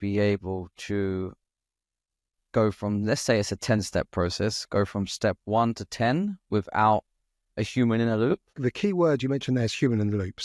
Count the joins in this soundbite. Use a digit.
1